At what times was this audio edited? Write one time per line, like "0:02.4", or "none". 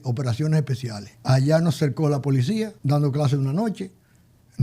0:01.1
0:02.8